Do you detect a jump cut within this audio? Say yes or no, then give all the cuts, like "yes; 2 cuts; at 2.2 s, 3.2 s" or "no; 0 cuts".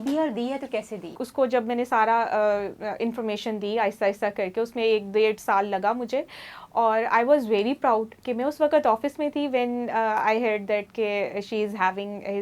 yes; 1 cut; at 1.2 s